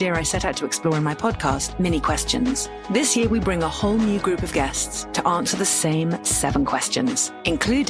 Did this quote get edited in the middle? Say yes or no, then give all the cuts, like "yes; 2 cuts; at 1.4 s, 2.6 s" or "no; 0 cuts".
yes; 1 cut; at 1.5 s